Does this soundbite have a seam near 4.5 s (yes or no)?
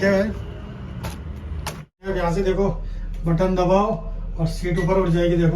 no